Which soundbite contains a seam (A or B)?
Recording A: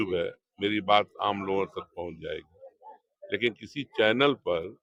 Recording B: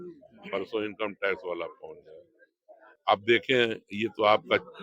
B